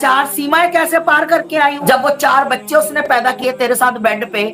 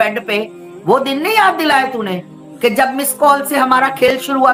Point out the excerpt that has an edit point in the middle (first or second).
first